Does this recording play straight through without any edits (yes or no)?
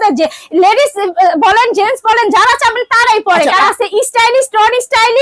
no